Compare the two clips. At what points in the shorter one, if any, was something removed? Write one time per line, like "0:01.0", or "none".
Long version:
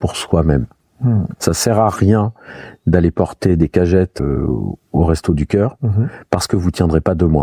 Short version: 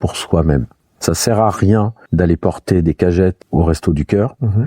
0:00.9
0:02.0
0:03.4